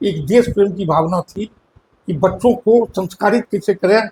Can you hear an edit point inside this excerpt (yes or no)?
no